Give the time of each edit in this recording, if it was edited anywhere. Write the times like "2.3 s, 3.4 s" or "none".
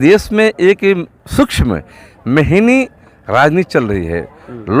none